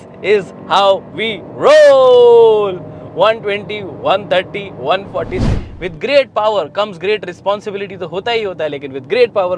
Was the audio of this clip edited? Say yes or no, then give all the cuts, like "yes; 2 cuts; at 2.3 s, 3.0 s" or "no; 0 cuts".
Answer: yes; 1 cut; at 5.5 s